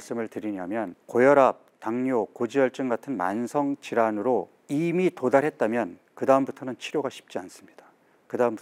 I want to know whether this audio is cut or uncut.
cut